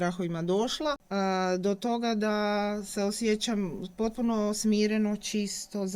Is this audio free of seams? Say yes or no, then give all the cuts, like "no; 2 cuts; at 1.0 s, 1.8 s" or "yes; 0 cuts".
no; 1 cut; at 1.0 s